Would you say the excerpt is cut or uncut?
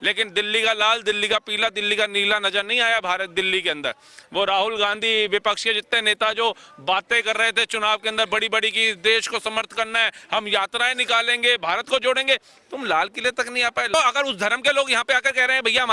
cut